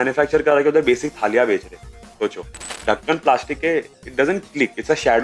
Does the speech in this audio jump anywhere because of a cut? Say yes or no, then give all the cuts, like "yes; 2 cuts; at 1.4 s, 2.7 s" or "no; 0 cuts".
yes; 1 cut; at 2.7 s